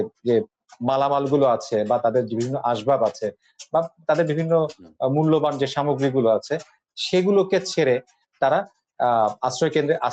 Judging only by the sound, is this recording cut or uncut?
uncut